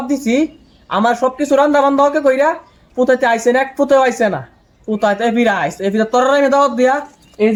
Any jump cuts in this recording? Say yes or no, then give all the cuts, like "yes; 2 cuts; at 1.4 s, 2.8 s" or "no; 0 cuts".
no; 0 cuts